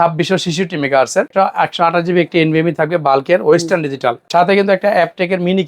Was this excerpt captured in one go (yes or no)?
no